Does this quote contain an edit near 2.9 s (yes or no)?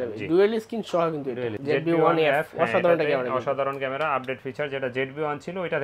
no